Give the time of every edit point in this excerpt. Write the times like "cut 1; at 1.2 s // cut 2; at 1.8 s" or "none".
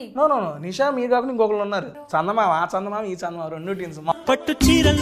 cut 1; at 2.0 s // cut 2; at 4.1 s